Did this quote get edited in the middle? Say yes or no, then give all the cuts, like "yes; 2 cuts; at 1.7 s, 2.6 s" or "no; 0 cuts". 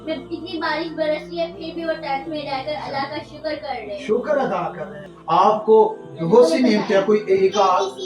yes; 1 cut; at 5.1 s